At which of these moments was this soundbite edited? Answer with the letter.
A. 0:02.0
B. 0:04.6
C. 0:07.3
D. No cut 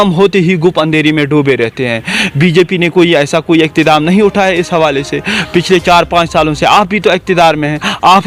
D